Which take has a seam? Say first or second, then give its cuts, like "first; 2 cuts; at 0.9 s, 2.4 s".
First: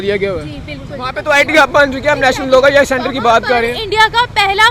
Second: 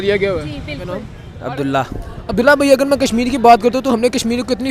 first; 1 cut; at 1.1 s